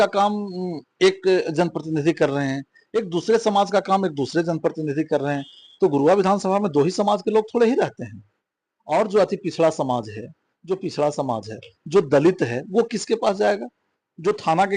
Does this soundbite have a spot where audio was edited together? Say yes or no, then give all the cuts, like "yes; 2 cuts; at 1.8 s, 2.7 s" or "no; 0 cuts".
no; 0 cuts